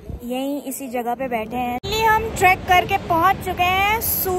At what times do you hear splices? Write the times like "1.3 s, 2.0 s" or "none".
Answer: 1.8 s